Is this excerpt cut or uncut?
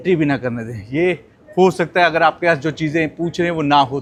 uncut